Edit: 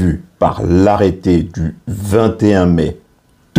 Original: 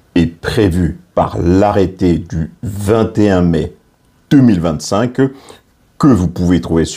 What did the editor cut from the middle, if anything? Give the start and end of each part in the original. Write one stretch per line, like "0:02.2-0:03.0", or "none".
none